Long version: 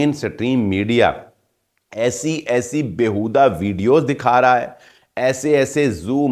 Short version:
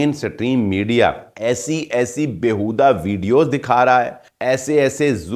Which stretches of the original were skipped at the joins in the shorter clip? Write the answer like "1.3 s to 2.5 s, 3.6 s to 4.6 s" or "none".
1.3 s to 1.8 s, 4.8 s to 5.0 s